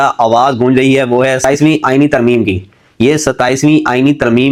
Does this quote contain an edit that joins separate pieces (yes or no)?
no